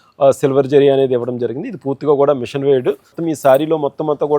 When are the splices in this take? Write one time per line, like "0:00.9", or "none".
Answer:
0:03.2